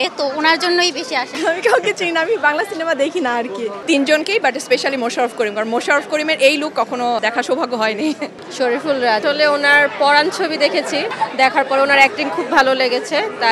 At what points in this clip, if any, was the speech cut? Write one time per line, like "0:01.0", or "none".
0:01.3
0:03.8
0:07.2
0:08.4
0:09.2
0:11.1